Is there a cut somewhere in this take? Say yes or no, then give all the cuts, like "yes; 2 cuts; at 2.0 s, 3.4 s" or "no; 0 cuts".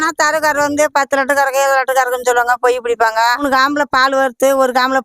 yes; 1 cut; at 3.4 s